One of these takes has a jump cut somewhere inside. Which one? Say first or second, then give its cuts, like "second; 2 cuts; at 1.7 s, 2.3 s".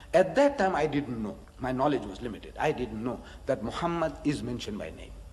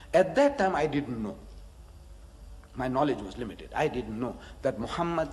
first; 1 cut; at 1.5 s